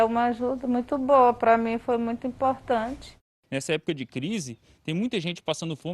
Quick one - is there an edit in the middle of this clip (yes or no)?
yes